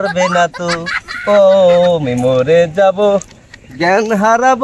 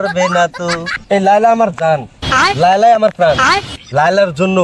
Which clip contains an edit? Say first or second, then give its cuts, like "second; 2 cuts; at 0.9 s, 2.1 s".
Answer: second; 1 cut; at 1.0 s